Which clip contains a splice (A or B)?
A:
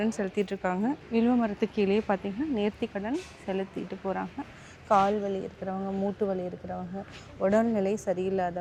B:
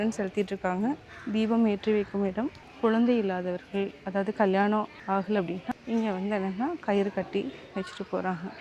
B